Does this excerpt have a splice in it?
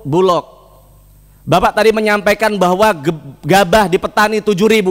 no; 0 cuts

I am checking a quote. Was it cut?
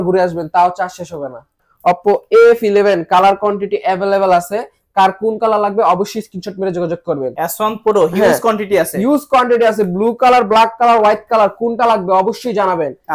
yes; 2 cuts; at 1.6 s, 7.4 s

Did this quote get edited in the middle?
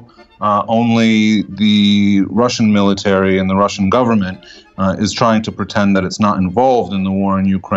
no; 0 cuts

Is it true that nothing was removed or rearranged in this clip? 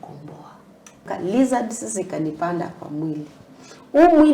no; 1 cut; at 1.1 s

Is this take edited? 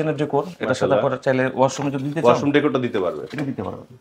no; 0 cuts

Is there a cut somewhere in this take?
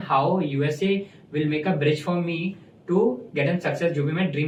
no; 0 cuts

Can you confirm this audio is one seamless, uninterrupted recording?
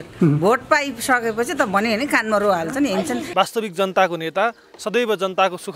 no; 1 cut; at 3.2 s

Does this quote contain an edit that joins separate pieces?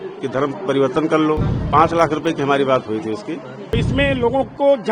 yes; 2 cuts; at 1.5 s, 3.7 s

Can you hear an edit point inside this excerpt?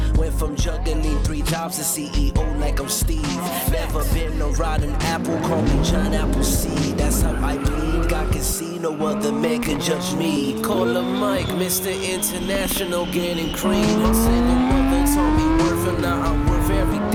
no; 0 cuts

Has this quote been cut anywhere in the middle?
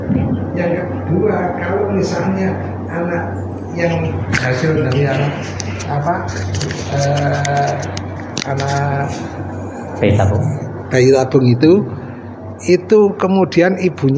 no; 0 cuts

